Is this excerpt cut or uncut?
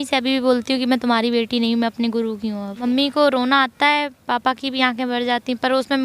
cut